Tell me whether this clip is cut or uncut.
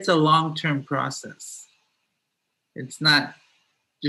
uncut